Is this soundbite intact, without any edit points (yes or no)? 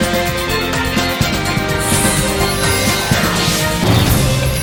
yes